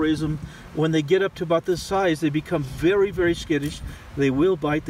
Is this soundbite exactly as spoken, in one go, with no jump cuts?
yes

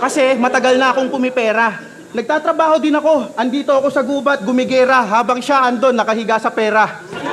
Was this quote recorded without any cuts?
yes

